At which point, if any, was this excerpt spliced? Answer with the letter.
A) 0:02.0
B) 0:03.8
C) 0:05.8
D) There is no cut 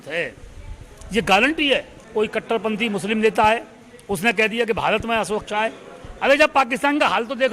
A